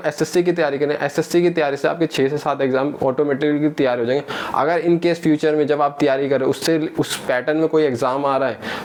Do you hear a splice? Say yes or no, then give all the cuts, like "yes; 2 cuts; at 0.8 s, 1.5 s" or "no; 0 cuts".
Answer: no; 0 cuts